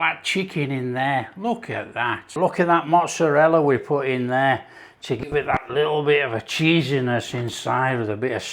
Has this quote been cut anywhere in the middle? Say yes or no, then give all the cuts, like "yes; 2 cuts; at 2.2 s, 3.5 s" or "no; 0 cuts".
yes; 1 cut; at 2.3 s